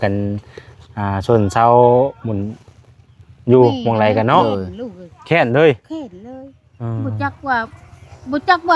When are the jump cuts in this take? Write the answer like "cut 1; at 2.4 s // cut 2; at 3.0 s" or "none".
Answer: none